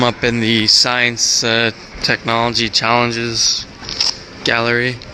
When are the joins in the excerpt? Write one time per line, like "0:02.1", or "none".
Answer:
0:01.8